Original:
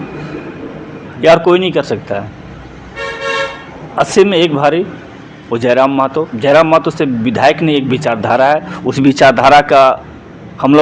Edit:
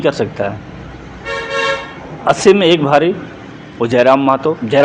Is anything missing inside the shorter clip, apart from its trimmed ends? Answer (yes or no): no